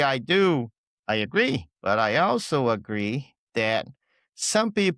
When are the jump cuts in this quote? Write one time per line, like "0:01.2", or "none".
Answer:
0:01.7